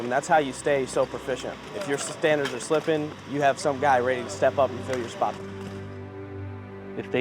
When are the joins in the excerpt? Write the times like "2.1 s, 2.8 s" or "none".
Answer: 1.5 s, 5.3 s

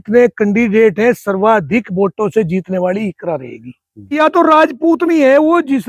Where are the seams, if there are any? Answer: 4.2 s

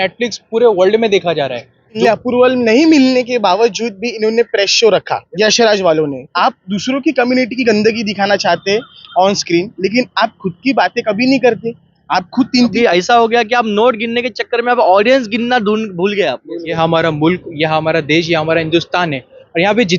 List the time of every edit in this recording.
2.0 s, 5.2 s, 6.3 s, 12.7 s, 16.7 s

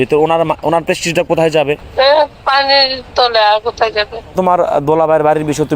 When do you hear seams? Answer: 1.9 s, 4.3 s

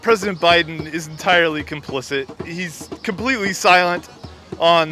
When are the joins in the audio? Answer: 2.3 s

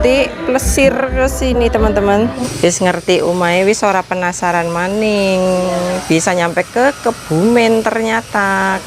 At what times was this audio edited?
2.4 s

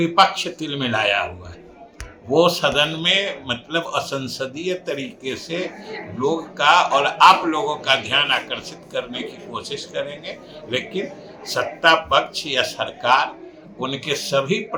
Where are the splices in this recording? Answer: none

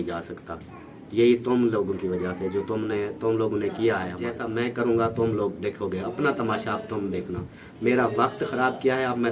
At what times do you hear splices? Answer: 4.3 s

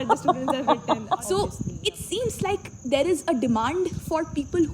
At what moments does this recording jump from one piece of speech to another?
1.2 s

